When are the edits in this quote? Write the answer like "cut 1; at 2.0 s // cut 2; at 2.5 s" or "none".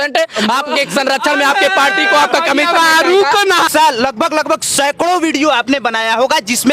cut 1; at 3.7 s